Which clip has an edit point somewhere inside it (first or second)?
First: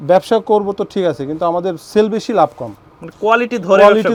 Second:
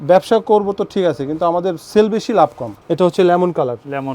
second